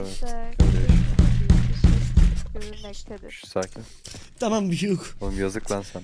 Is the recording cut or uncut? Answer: cut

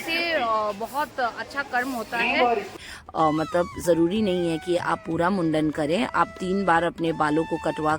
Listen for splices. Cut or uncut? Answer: cut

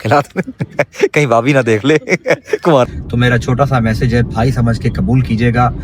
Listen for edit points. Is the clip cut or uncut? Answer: cut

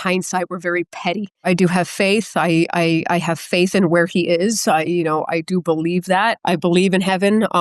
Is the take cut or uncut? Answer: cut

